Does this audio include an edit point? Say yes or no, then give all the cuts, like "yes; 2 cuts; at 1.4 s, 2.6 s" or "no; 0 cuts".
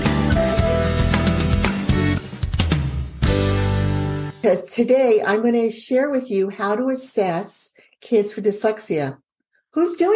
yes; 1 cut; at 4.4 s